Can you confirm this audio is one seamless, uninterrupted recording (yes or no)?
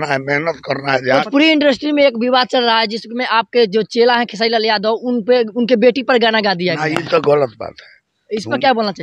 no